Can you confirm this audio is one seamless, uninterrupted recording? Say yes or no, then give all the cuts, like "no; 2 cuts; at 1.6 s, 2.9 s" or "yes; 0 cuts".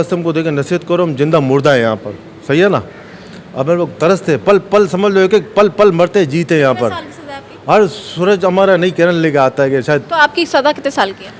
yes; 0 cuts